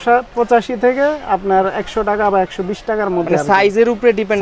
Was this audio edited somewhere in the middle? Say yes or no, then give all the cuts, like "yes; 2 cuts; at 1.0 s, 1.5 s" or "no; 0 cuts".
no; 0 cuts